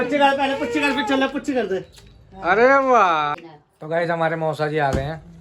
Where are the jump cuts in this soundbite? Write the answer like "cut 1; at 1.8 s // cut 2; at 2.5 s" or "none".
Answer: cut 1; at 3.4 s